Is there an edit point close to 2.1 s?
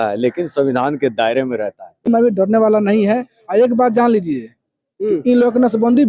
yes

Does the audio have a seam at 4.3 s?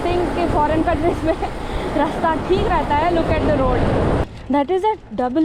yes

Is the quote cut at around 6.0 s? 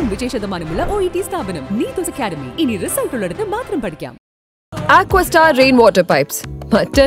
no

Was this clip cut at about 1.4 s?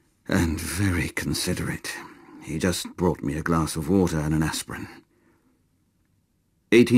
yes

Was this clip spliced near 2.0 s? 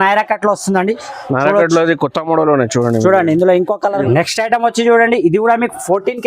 no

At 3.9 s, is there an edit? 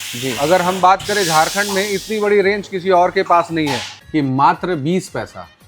yes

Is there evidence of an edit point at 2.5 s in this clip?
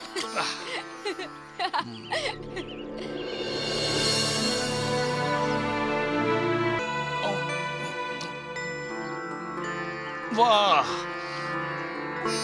no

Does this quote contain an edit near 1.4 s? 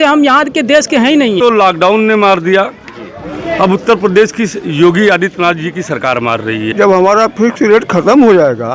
yes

